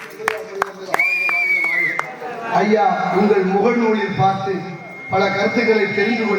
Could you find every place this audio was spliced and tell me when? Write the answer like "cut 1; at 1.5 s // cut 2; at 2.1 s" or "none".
cut 1; at 2.4 s